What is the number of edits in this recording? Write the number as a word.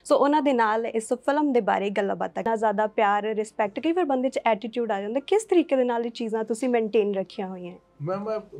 one